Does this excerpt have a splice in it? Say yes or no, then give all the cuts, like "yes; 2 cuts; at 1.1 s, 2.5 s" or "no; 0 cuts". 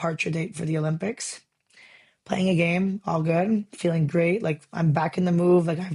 no; 0 cuts